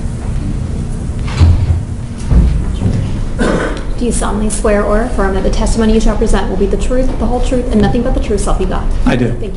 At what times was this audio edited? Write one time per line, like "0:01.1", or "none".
0:07.7